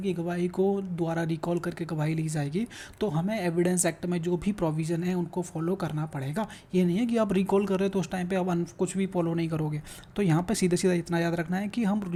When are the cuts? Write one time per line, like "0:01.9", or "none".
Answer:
none